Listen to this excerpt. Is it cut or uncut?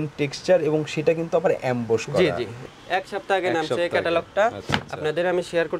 cut